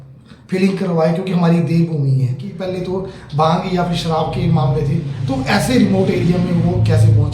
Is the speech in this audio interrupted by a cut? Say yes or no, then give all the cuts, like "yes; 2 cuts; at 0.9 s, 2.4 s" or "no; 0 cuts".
yes; 1 cut; at 2.5 s